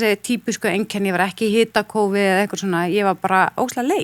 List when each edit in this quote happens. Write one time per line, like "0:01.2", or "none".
none